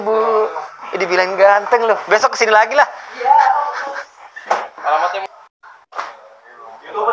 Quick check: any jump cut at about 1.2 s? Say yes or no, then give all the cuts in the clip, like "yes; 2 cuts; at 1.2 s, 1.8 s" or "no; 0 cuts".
no; 1 cut; at 5.2 s